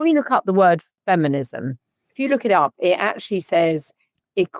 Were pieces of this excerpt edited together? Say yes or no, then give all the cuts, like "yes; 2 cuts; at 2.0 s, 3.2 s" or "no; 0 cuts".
yes; 1 cut; at 0.9 s